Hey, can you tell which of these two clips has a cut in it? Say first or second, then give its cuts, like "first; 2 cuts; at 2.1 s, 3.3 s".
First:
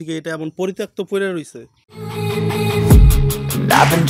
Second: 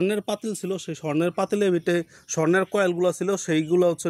first; 1 cut; at 1.9 s